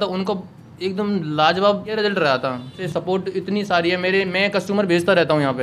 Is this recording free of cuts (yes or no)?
no